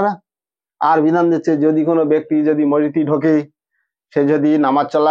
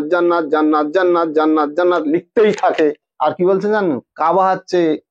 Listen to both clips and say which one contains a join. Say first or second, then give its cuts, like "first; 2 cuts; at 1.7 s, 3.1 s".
second; 1 cut; at 3.1 s